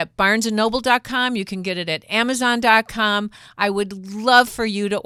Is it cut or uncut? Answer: uncut